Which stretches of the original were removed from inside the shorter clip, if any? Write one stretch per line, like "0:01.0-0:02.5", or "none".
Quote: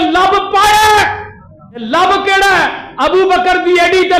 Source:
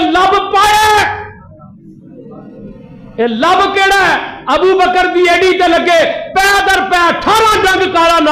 0:01.8-0:03.3

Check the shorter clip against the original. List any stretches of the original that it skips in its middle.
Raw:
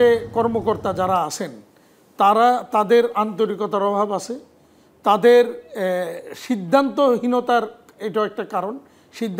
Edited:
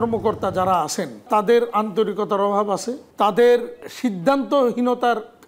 0:01.6-0:02.6
0:04.4-0:04.8
0:05.7-0:06.3

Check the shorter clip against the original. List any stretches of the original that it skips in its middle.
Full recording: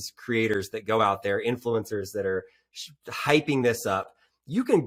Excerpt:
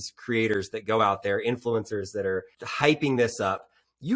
0:02.6-0:03.1

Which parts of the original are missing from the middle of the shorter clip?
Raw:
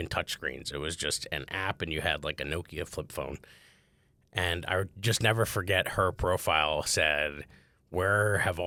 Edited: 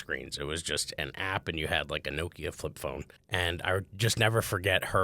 0:03.5-0:04.2

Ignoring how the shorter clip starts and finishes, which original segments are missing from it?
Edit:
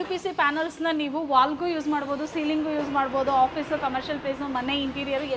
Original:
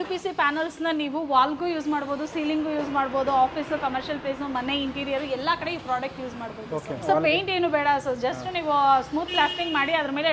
none

